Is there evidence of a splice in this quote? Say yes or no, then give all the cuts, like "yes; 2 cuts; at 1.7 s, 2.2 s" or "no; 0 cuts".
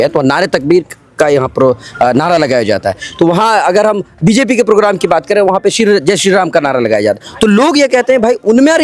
no; 0 cuts